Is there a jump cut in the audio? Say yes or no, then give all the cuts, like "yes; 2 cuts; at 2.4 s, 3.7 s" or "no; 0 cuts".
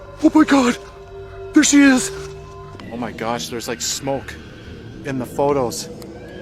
yes; 1 cut; at 2.9 s